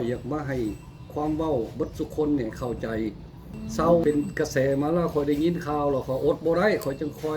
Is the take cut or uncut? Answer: cut